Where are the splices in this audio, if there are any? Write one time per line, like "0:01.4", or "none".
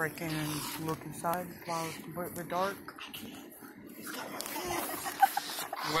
0:03.1